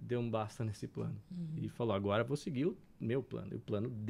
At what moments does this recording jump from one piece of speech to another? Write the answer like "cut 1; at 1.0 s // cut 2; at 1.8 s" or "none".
none